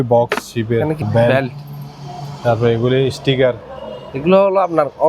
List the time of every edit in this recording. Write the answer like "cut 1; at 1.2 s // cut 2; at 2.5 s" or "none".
cut 1; at 1.0 s